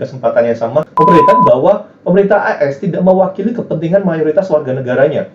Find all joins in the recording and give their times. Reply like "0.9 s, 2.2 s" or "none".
0.9 s